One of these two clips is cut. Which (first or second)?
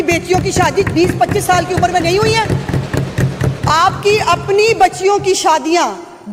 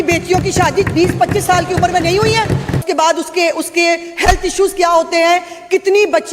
second